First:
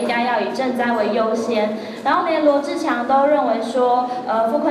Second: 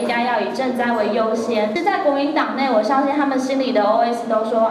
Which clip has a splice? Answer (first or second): second